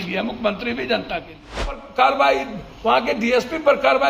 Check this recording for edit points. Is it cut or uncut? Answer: cut